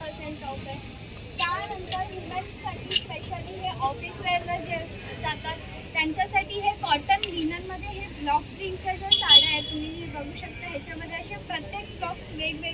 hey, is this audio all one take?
yes; 0 cuts

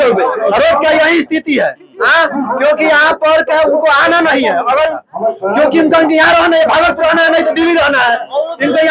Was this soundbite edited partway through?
yes; 1 cut; at 5.0 s

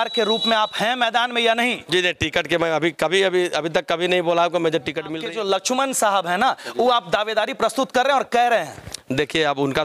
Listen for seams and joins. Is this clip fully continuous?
no; 1 cut; at 5.2 s

